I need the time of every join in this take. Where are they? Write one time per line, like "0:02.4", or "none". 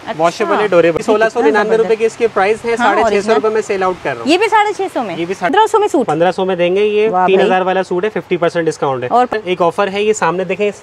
0:01.0
0:05.5
0:09.3